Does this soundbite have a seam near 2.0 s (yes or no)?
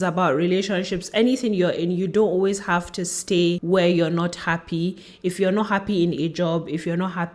no